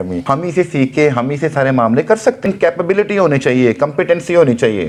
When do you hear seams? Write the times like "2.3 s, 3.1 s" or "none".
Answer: none